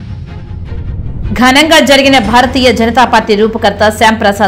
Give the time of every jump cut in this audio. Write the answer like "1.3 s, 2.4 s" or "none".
1.1 s